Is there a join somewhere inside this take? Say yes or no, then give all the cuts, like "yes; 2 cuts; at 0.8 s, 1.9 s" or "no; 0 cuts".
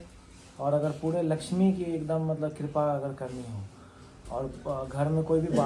no; 0 cuts